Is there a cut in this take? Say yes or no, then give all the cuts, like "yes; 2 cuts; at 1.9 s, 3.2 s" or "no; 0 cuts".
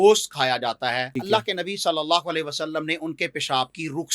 yes; 1 cut; at 1.1 s